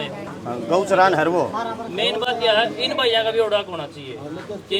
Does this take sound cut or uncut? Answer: uncut